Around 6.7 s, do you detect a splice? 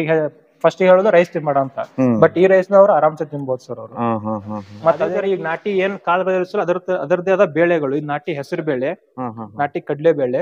no; 1 cut; at 5.1 s

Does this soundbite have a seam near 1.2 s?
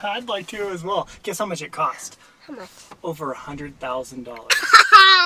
no; 0 cuts

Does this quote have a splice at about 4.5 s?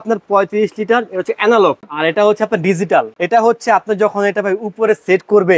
no; 2 cuts; at 1.9 s, 3.2 s

